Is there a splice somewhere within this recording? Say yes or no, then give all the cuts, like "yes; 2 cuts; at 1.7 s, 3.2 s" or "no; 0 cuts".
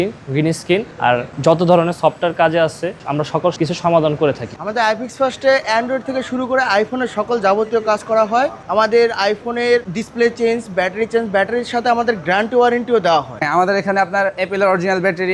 yes; 2 cuts; at 4.5 s, 13.4 s